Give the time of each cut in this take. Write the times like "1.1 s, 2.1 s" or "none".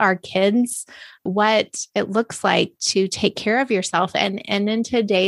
1.2 s